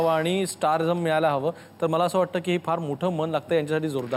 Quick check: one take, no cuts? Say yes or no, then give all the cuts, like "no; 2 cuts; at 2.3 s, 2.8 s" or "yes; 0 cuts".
yes; 0 cuts